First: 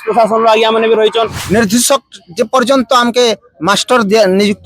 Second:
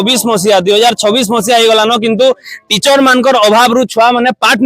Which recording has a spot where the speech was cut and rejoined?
first; 1 cut; at 1.4 s

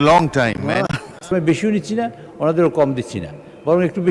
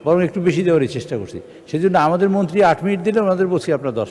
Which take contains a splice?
first; 1 cut; at 1.2 s

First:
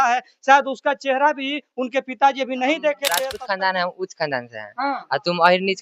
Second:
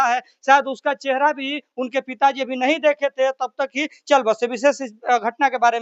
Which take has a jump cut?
first; 1 cut; at 3.3 s

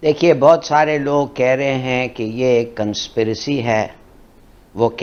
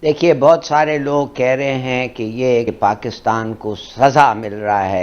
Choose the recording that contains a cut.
second; 1 cut; at 2.7 s

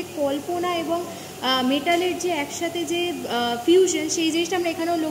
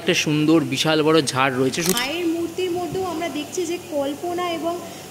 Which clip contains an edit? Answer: second; 1 cut; at 1.9 s

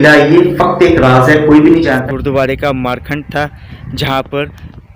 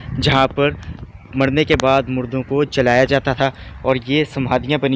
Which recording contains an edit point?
first; 1 cut; at 2.0 s

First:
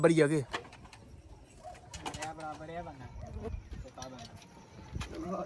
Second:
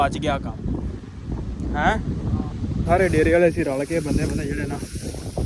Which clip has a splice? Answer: second; 1 cut; at 3.0 s

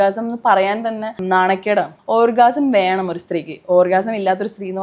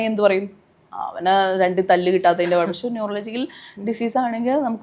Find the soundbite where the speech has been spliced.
first; 2 cuts; at 1.2 s, 2.0 s

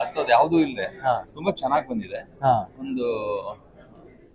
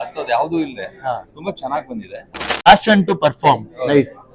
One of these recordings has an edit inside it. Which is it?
second; 1 cut; at 2.7 s

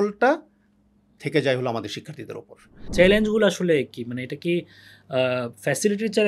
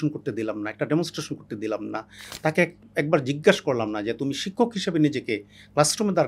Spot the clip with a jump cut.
first; 1 cut; at 2.8 s

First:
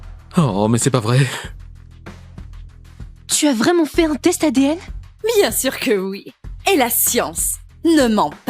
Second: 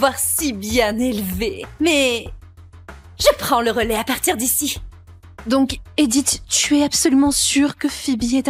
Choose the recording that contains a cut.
first; 2 cuts; at 1.5 s, 3.4 s

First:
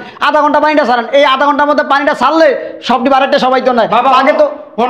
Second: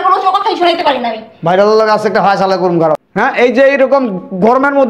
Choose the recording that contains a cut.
second; 1 cut; at 3.1 s

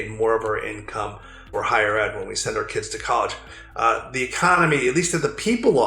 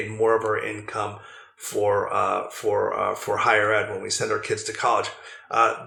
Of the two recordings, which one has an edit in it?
first; 1 cut; at 1.5 s

